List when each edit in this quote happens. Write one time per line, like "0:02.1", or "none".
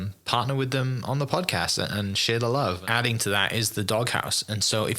0:02.8